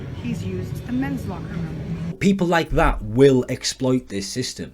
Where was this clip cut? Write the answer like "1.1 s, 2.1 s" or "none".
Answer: 2.2 s